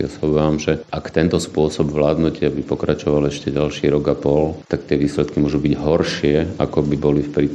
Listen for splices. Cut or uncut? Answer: cut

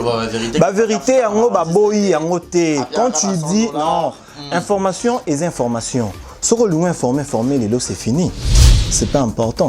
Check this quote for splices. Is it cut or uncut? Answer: cut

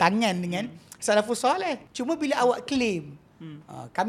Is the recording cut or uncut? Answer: cut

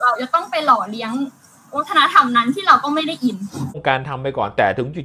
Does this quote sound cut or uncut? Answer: cut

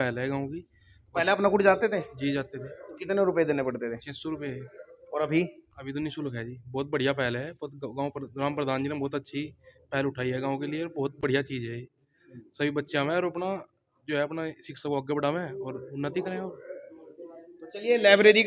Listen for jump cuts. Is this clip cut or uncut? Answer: uncut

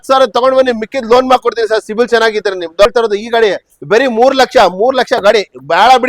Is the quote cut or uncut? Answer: cut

